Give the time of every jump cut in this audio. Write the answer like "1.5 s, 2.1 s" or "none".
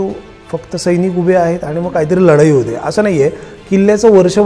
none